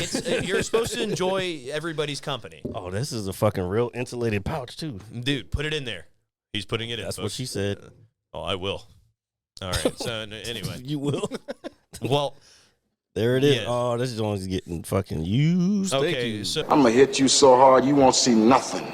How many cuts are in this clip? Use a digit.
1